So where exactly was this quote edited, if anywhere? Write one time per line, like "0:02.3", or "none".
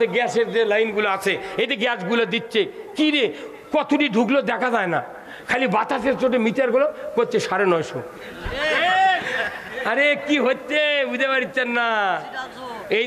none